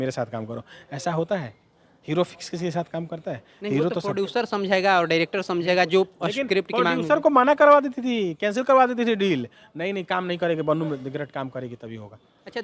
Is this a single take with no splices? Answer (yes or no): yes